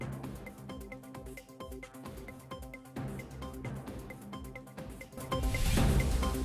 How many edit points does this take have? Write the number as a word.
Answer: one